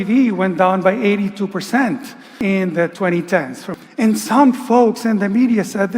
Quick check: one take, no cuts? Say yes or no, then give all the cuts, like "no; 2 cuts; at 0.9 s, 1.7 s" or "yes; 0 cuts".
no; 2 cuts; at 2.3 s, 3.7 s